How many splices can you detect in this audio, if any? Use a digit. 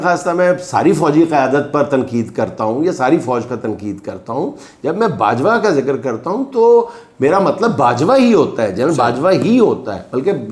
0